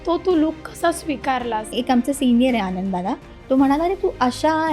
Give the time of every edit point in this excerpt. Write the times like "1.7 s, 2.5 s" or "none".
1.7 s